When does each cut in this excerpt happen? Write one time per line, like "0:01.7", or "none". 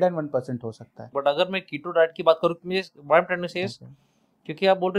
0:01.1